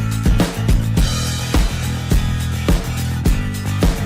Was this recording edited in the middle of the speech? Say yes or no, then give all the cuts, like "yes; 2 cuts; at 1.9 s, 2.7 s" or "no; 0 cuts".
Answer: no; 0 cuts